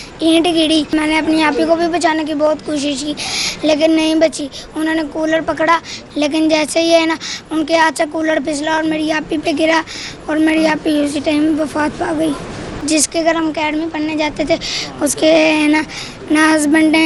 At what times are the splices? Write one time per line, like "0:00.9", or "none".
0:00.9
0:06.0
0:12.8